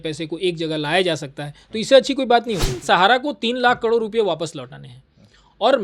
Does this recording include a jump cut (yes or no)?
yes